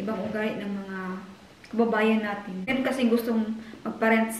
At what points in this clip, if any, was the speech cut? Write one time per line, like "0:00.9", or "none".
0:02.7